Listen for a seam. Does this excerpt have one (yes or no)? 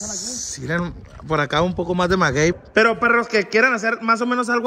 yes